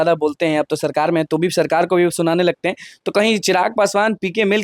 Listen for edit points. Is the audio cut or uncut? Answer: uncut